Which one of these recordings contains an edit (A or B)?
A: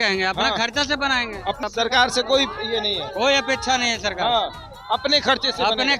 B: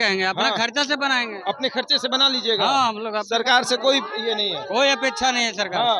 A